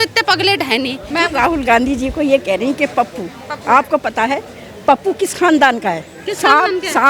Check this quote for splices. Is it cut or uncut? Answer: cut